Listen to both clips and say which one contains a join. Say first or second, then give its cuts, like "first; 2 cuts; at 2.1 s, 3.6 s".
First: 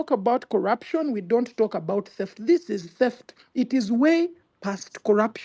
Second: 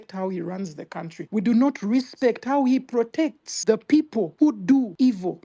second; 3 cuts; at 1.2 s, 3.5 s, 4.7 s